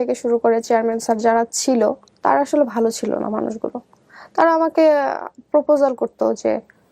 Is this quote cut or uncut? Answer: cut